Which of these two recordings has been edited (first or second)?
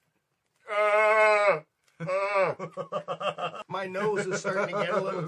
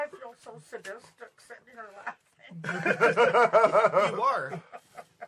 first